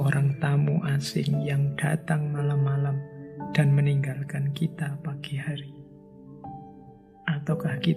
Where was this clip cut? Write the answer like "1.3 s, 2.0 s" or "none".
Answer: none